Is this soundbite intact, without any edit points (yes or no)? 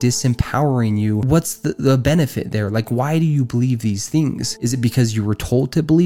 no